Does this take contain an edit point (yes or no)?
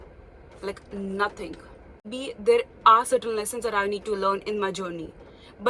yes